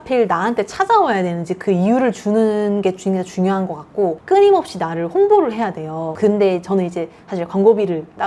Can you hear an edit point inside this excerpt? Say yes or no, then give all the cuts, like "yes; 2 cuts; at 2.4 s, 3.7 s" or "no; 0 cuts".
no; 0 cuts